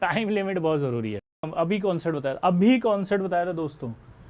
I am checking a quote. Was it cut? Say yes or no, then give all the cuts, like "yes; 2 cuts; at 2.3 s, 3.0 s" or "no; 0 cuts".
yes; 1 cut; at 1.5 s